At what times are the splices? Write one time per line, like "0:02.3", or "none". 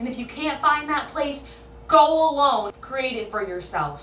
0:02.8